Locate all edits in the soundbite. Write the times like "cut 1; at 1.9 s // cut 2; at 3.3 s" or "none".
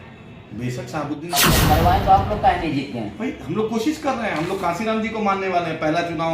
cut 1; at 1.3 s